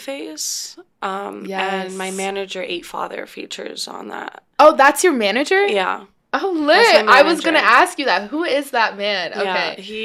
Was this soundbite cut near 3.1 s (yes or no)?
no